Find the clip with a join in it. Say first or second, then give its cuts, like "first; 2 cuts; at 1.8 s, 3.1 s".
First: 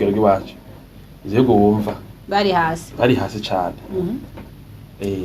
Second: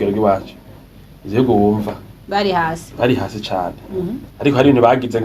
second; 1 cut; at 4.3 s